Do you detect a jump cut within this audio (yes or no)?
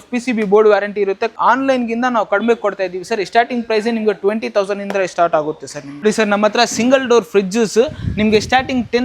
yes